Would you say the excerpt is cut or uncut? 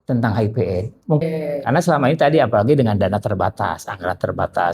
cut